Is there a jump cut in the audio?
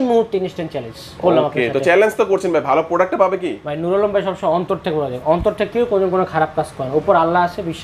no; 0 cuts

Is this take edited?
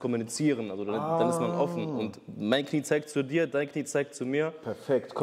no; 0 cuts

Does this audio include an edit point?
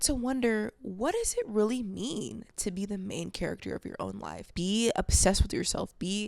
yes; 1 cut; at 4.4 s

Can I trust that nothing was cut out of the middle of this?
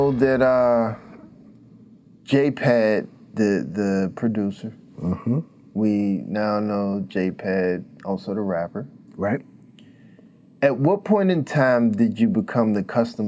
yes; 0 cuts

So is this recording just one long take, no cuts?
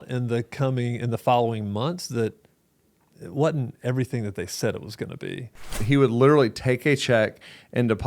no; 1 cut; at 5.8 s

